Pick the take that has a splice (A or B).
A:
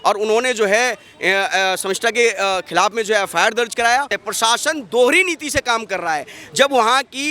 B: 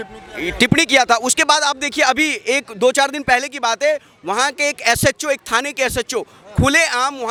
A